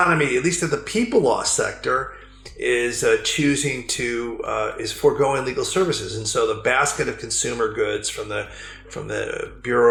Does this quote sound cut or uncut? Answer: uncut